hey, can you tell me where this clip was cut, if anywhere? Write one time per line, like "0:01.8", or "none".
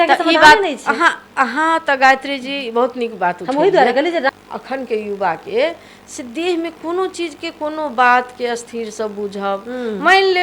0:04.3